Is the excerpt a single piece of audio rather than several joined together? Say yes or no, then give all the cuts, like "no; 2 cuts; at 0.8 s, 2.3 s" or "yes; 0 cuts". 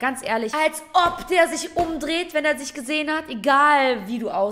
yes; 0 cuts